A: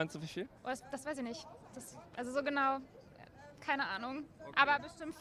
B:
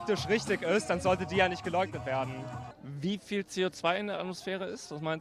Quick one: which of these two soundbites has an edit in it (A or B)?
B